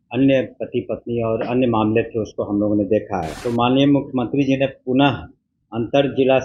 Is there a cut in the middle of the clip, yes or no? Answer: yes